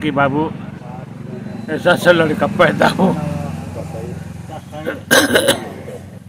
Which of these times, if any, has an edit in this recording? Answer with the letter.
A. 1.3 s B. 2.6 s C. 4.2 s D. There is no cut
D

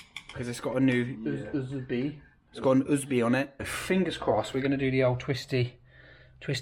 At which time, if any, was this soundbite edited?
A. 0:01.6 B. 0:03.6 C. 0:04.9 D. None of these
B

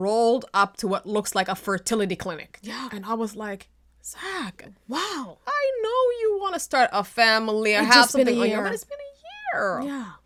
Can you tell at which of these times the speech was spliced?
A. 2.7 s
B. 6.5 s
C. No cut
C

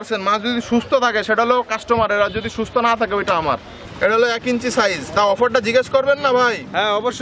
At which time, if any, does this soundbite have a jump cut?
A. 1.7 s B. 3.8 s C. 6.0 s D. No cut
B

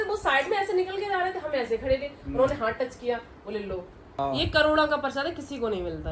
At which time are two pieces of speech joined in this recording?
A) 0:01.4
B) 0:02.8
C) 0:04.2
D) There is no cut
C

